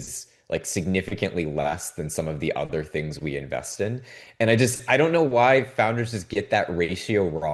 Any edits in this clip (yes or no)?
no